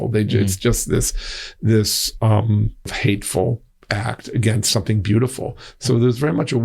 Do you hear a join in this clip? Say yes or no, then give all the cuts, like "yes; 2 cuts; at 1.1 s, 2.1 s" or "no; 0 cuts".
yes; 2 cuts; at 2.9 s, 3.7 s